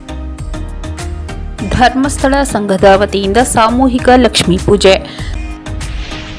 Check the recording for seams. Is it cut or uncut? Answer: uncut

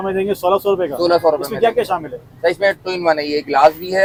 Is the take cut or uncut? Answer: uncut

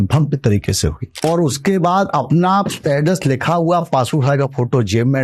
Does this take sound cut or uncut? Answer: cut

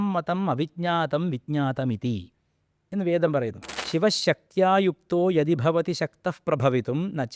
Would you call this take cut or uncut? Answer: cut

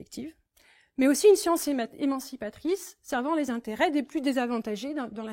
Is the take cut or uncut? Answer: uncut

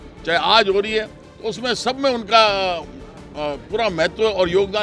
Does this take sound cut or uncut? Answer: uncut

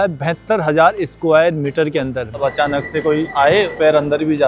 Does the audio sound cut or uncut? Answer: cut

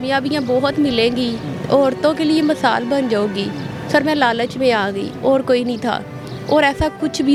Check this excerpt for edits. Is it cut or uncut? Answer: uncut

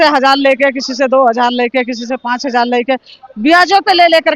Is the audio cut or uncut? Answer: uncut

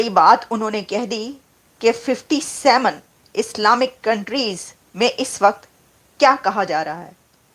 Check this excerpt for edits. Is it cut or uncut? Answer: uncut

